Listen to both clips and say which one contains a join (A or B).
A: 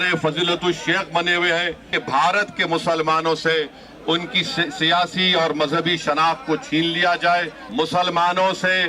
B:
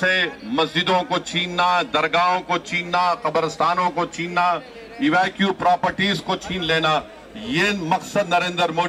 A